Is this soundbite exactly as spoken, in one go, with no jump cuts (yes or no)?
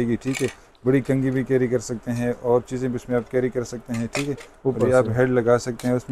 yes